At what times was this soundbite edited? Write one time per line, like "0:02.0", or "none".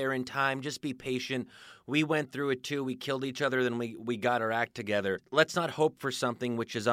0:05.2

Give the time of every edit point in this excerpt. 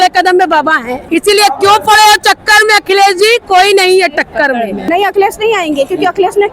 0:00.9
0:04.8

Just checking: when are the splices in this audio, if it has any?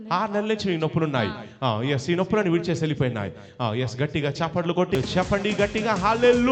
0:05.0

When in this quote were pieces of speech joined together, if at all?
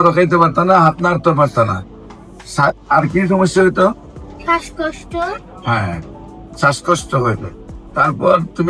none

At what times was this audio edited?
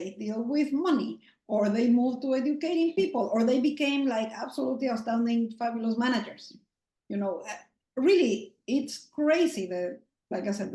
none

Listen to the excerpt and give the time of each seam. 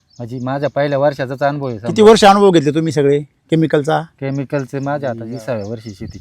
0:05.2

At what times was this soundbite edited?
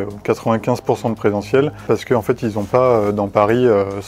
0:01.8

